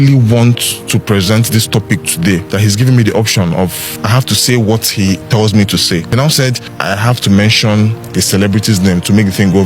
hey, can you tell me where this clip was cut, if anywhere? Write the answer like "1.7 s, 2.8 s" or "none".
2.5 s, 3.9 s, 6.4 s, 8.0 s